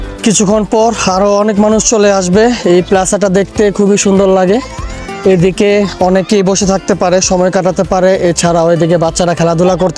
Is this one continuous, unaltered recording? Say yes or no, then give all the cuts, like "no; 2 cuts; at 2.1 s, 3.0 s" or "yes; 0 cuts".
yes; 0 cuts